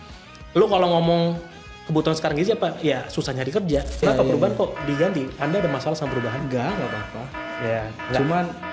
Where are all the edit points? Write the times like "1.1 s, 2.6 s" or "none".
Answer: 4.0 s